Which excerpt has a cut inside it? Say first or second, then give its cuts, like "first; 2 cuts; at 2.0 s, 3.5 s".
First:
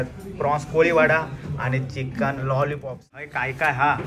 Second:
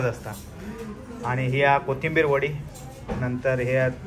first; 1 cut; at 3.1 s